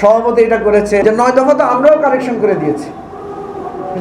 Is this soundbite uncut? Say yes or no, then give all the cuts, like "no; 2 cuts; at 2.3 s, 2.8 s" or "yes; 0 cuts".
no; 1 cut; at 1.0 s